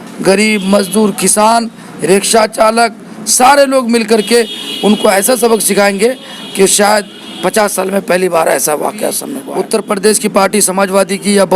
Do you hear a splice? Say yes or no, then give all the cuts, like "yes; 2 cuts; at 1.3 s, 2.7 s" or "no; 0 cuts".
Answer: yes; 1 cut; at 9.3 s